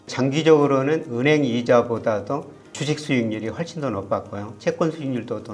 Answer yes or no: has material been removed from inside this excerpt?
no